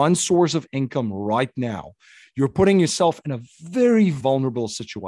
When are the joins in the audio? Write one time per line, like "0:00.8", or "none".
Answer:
0:04.2